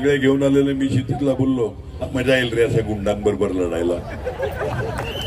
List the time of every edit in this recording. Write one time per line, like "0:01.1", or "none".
0:02.1